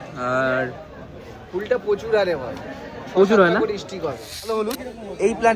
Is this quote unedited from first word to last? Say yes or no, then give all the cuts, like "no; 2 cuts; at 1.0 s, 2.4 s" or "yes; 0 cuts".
no; 1 cut; at 4.6 s